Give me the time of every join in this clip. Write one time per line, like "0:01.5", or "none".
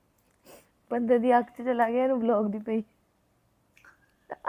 none